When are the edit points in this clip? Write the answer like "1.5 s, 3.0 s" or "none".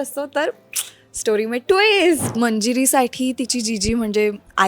2.2 s